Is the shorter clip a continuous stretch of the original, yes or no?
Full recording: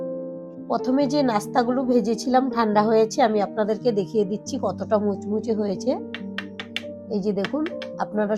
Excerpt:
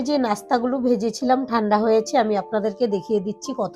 yes